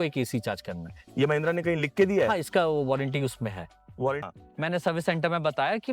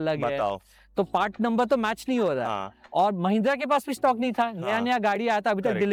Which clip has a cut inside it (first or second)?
first